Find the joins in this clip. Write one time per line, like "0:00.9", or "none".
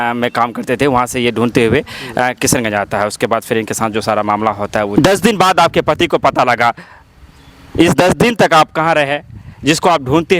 0:05.0